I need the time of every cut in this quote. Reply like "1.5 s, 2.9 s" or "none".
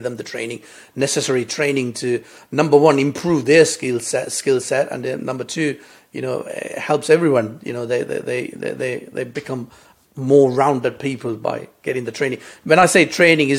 none